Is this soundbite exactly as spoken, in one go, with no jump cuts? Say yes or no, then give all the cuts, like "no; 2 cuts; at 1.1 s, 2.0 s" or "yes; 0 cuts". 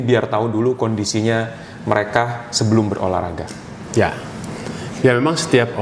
yes; 0 cuts